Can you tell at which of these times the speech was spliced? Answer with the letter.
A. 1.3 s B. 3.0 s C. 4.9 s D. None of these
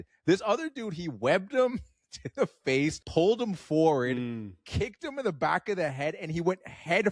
B